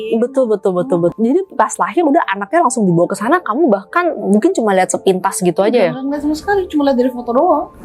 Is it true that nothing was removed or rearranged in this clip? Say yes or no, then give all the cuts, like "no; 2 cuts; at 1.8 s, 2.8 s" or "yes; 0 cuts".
no; 1 cut; at 1.1 s